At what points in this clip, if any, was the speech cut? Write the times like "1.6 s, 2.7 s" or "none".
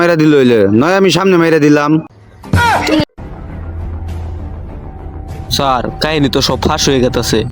3.1 s, 4.8 s

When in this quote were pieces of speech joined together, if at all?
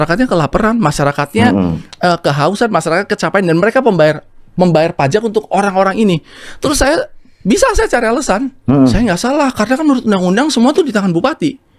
none

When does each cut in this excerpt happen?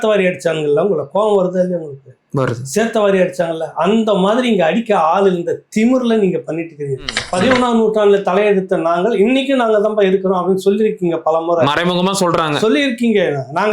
7.2 s

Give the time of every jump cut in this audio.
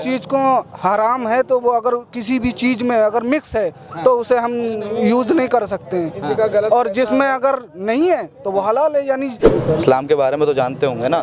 9.4 s

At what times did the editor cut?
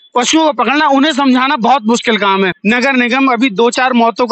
2.6 s

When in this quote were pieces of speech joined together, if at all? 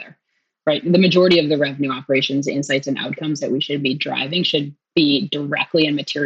4.8 s

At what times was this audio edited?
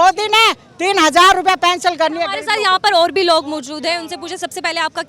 none

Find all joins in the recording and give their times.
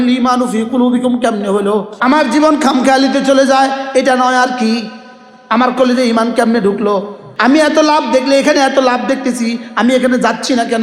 1.9 s, 7.2 s

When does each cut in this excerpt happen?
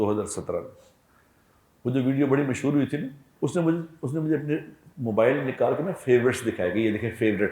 3.2 s

